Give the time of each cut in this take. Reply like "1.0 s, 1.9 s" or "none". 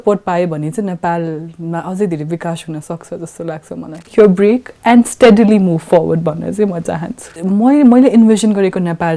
4.1 s, 7.3 s

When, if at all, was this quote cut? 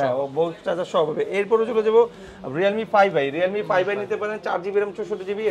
none

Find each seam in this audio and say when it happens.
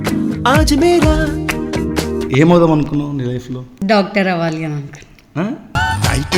2.2 s, 3.7 s

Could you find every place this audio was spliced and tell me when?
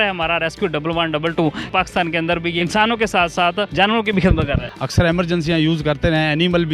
1.6 s, 2.6 s, 3.7 s, 4.7 s

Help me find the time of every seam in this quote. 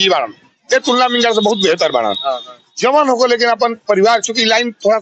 none

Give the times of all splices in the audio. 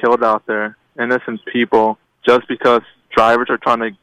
2.1 s

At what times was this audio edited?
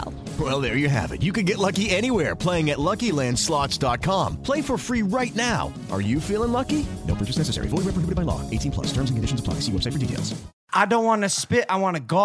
10.7 s

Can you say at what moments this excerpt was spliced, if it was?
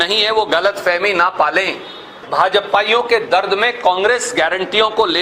2.2 s

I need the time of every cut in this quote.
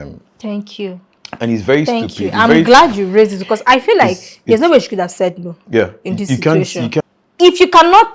7.0 s

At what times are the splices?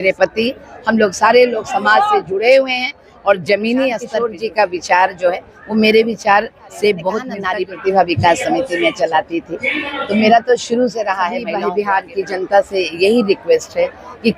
4.2 s, 7.3 s, 11.5 s

